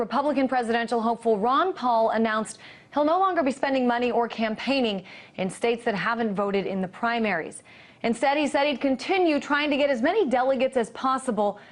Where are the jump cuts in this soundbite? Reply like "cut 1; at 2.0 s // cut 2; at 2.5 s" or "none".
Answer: none